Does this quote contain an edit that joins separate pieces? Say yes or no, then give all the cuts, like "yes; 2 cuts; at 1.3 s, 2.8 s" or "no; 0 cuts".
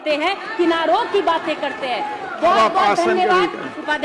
no; 0 cuts